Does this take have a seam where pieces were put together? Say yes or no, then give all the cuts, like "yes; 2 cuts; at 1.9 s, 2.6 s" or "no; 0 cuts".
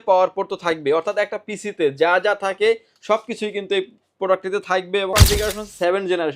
yes; 1 cut; at 5.1 s